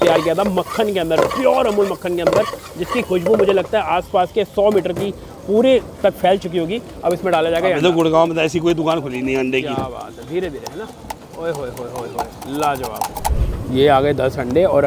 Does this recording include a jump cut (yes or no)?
yes